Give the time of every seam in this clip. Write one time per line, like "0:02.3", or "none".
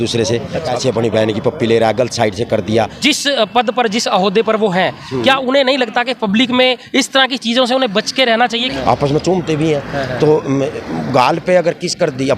0:00.7
0:02.9
0:08.7

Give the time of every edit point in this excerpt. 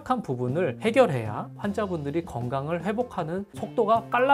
none

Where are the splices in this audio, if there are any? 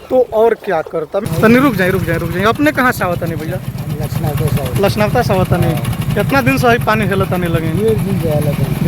0:01.2

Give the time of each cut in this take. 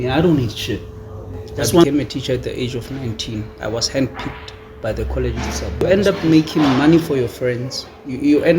0:01.8
0:05.8

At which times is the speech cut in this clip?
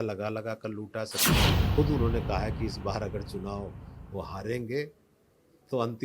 0:01.4

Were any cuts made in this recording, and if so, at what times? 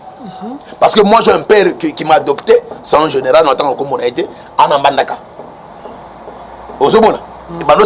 none

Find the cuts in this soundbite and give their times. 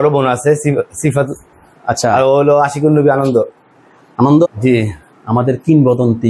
0:04.5

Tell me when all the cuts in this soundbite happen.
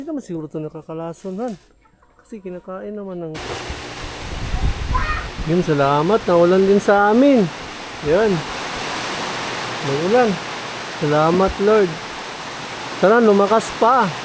0:03.4

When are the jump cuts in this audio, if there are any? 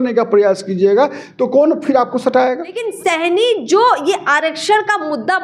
0:02.9

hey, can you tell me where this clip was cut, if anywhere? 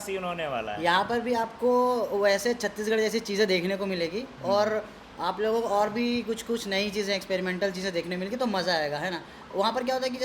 none

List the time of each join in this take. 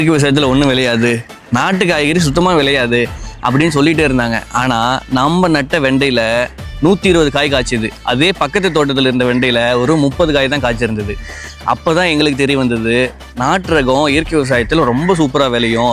none

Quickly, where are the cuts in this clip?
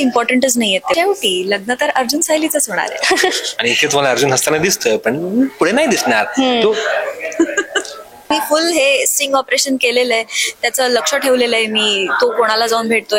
0:00.9
0:08.3

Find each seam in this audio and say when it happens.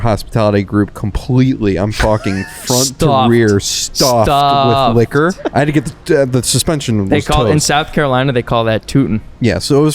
0:05.4

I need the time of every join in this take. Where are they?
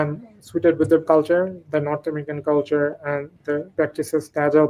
0:01.0
0:03.9

